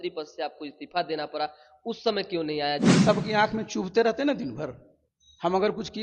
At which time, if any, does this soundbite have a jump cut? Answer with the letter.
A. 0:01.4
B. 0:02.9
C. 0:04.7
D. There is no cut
B